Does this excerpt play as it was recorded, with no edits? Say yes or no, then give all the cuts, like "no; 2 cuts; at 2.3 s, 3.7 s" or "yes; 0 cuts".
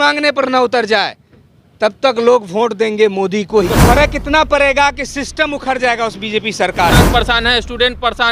no; 2 cuts; at 3.8 s, 7.0 s